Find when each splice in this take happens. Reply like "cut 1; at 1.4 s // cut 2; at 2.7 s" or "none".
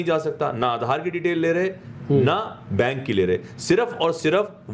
none

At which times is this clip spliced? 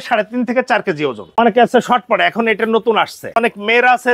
cut 1; at 1.4 s // cut 2; at 3.3 s

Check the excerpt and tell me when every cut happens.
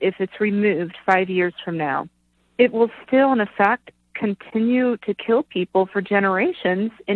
none

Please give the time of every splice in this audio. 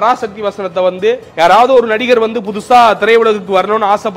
cut 1; at 1.3 s

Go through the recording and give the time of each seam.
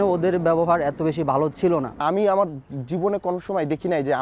none

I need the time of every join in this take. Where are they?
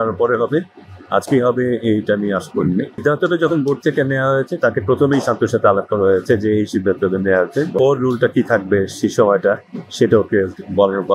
cut 1; at 2.9 s // cut 2; at 7.7 s

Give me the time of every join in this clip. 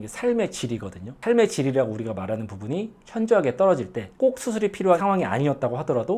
cut 1; at 1.2 s

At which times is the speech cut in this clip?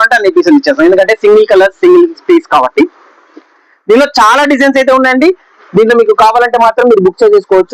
none

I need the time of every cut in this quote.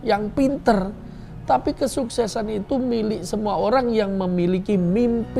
none

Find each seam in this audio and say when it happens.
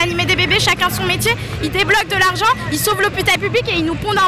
none

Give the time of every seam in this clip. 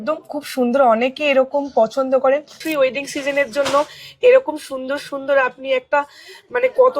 cut 1; at 2.6 s

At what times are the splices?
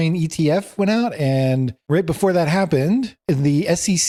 none

